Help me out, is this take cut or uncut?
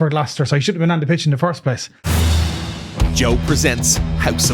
cut